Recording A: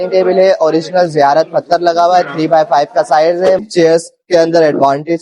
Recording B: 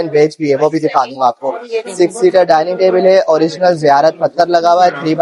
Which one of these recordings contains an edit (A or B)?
A